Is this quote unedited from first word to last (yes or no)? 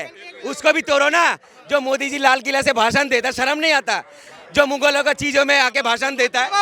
yes